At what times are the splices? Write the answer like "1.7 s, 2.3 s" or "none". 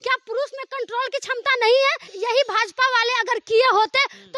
2.1 s